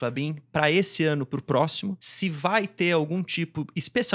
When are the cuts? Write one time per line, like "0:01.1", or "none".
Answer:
0:02.1